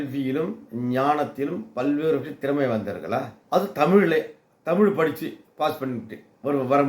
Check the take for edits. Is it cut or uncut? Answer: uncut